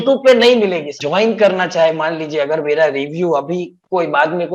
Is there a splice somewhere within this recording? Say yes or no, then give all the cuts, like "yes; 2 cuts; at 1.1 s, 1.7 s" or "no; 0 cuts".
yes; 1 cut; at 1.0 s